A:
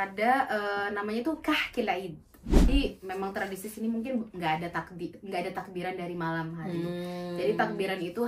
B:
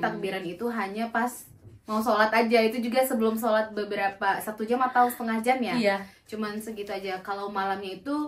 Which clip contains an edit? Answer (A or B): A